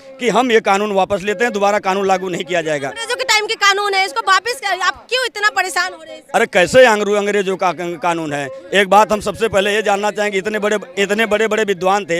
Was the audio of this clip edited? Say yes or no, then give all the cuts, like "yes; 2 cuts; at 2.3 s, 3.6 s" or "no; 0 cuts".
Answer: no; 0 cuts